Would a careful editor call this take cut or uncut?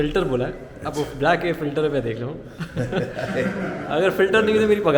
uncut